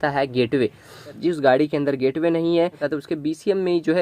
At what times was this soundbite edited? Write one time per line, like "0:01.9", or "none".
0:01.2
0:02.8